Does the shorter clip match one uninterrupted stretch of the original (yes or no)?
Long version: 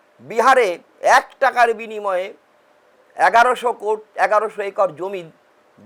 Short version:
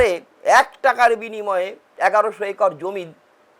no